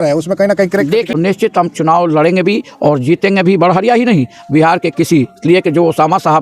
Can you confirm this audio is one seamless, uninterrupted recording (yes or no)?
no